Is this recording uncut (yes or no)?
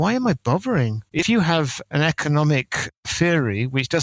no